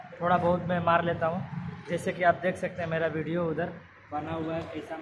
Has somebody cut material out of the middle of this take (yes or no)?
no